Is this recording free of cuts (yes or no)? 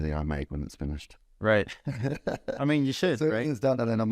yes